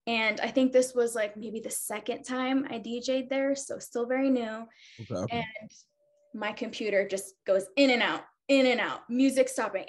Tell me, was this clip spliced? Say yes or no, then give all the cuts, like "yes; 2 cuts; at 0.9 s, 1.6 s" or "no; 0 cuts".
no; 0 cuts